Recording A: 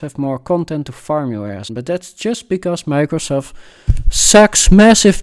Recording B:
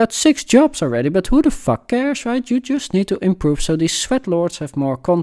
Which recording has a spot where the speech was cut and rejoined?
A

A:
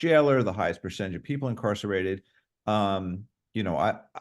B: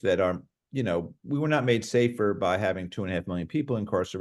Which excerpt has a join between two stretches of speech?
A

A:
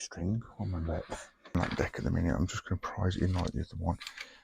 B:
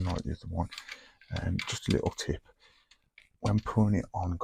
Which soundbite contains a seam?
A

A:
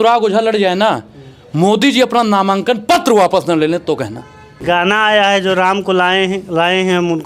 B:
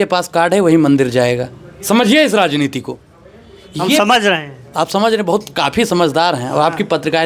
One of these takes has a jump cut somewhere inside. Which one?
A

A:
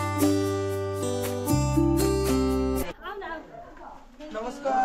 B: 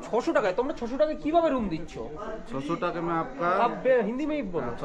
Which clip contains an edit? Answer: A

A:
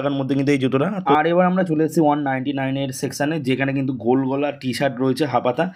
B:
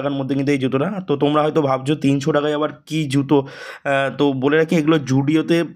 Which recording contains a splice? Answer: A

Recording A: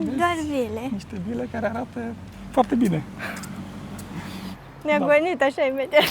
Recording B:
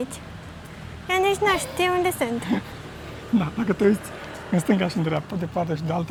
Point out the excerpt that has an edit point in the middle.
A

